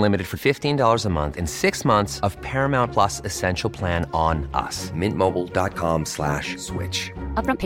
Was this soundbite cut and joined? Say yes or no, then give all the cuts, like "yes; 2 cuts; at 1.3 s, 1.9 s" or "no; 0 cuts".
no; 0 cuts